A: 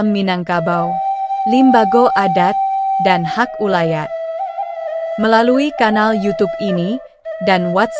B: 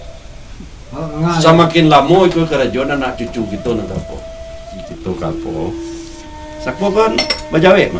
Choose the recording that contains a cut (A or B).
B